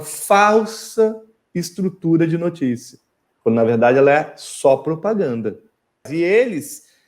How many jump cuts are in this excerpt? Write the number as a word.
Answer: one